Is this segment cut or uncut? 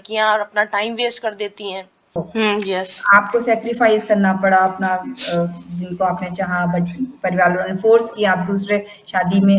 cut